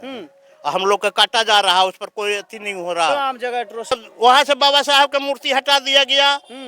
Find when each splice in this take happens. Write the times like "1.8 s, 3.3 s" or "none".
3.9 s